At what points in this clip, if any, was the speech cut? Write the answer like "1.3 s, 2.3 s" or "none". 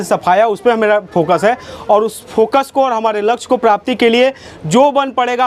none